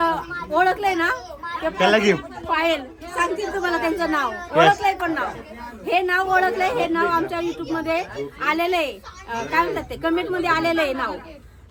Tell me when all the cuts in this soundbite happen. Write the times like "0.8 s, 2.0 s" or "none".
none